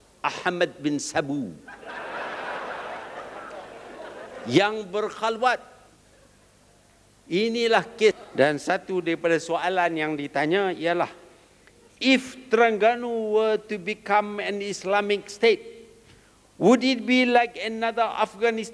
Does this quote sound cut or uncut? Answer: cut